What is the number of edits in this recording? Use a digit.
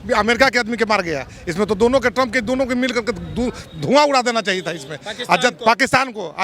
0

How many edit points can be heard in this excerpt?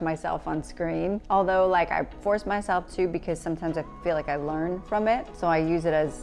2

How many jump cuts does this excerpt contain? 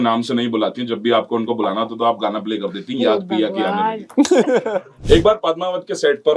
1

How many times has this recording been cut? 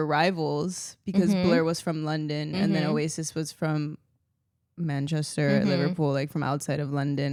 0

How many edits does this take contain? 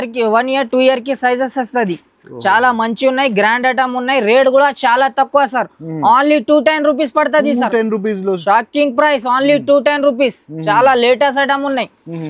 0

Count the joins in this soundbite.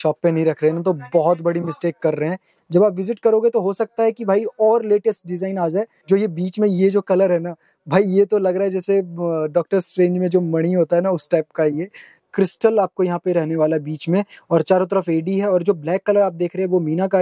3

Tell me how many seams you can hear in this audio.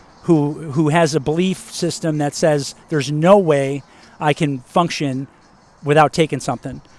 0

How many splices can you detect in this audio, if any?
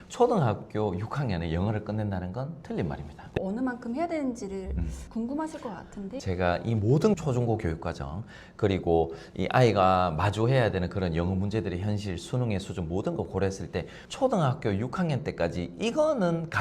3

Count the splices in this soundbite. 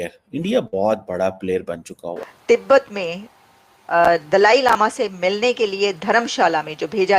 1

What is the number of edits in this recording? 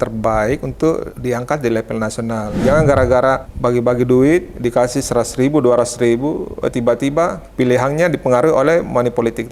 4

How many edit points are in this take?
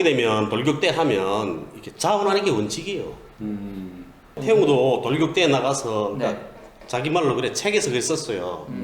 1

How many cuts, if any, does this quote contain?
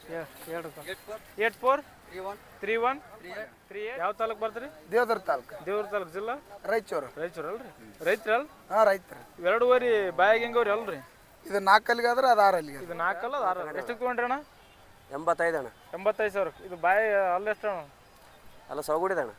2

